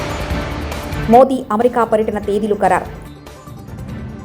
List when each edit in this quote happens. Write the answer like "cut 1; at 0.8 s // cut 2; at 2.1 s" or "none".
none